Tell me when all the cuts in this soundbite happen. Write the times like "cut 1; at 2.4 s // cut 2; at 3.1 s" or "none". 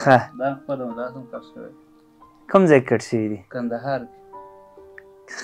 none